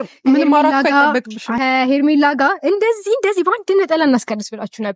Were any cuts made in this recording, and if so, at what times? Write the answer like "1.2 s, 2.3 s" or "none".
1.4 s

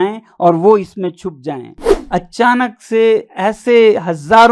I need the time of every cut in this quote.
1.9 s

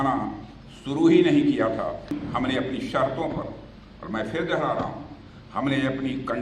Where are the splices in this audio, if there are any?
2.1 s

